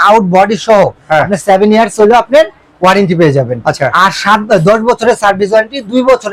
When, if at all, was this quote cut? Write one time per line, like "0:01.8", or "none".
none